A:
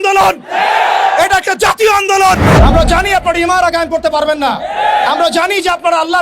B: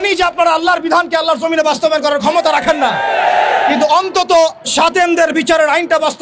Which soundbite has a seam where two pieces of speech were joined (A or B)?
A